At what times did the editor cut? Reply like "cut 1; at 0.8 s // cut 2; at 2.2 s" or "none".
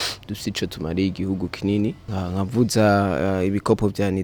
cut 1; at 2.0 s